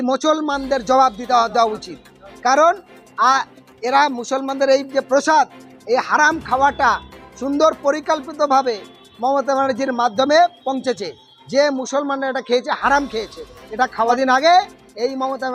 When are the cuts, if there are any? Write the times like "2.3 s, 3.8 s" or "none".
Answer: 14.1 s